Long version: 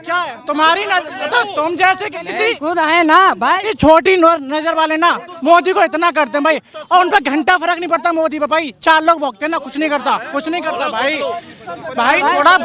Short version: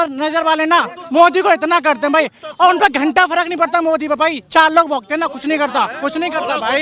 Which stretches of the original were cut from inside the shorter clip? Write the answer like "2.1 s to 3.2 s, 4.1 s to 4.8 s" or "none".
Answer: none

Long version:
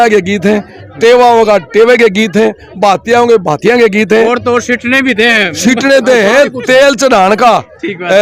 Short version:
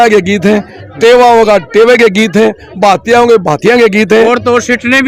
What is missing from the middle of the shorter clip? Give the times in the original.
none

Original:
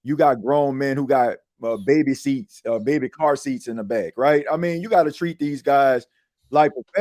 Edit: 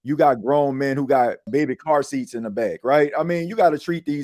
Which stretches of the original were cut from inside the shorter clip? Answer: 1.5 s to 2.8 s

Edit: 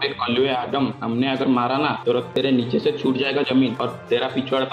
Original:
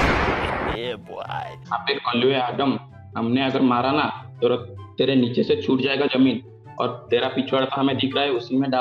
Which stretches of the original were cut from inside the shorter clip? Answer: 2.8 s to 3.1 s, 4.2 s to 4.7 s, 6.4 s to 6.8 s

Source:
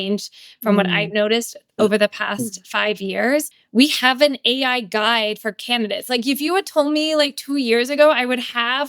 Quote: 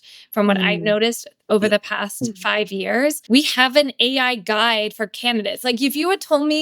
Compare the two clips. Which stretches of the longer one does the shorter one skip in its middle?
3.5 s to 3.7 s

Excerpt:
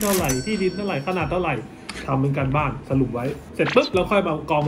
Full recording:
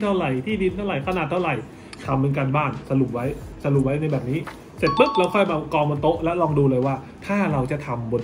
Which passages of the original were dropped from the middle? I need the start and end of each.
3.4 s to 4.7 s

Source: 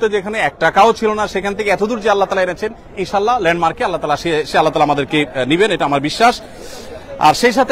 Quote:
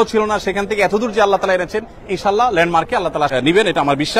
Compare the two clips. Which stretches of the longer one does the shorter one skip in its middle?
4.2 s to 5.3 s

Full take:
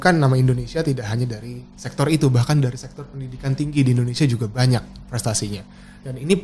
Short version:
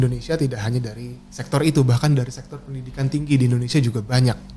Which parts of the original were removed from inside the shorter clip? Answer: none

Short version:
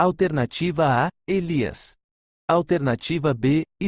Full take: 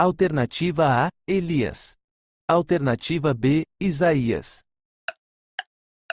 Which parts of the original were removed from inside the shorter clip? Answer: none

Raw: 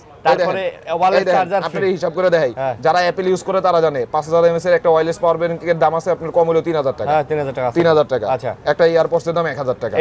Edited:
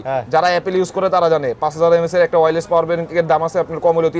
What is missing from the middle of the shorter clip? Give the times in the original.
none

